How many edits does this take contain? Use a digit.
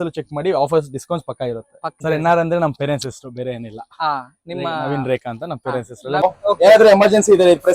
2